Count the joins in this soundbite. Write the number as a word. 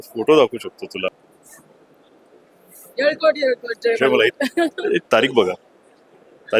one